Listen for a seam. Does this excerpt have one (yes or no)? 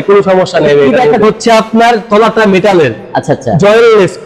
yes